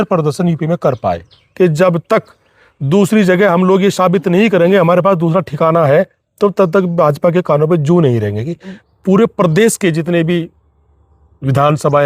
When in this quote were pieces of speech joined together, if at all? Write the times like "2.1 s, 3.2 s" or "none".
1.4 s, 8.8 s